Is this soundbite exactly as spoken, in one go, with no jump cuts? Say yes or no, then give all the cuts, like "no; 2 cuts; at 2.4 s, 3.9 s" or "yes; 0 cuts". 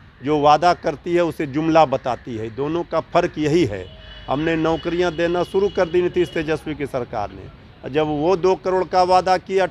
yes; 0 cuts